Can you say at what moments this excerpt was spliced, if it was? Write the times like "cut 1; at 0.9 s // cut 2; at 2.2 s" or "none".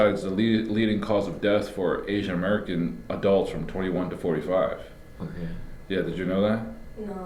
none